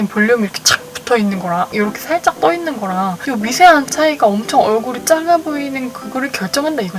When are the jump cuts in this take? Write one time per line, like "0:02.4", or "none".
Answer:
0:01.7
0:03.2